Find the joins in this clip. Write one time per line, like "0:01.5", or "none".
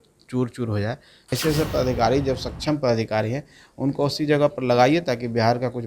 0:01.4